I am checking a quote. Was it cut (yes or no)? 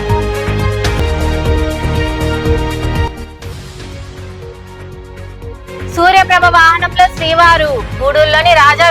no